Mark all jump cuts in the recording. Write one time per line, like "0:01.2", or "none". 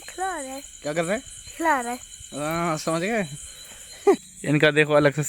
0:04.2